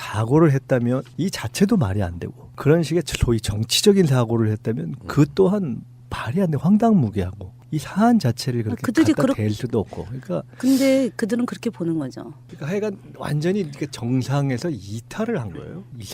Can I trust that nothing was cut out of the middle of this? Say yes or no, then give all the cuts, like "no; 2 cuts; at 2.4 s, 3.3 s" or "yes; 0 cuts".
no; 1 cut; at 4.2 s